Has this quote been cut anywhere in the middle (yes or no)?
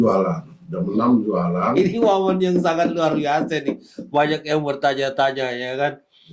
yes